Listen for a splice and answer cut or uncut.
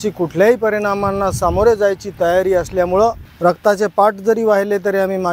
cut